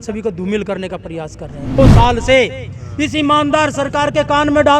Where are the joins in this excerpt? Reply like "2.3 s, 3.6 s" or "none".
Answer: 1.8 s